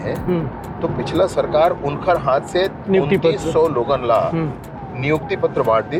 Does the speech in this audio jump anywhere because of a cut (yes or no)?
no